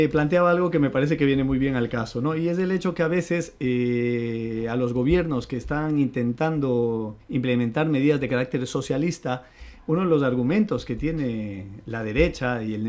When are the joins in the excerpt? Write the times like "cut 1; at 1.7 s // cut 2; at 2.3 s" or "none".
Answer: cut 1; at 8.6 s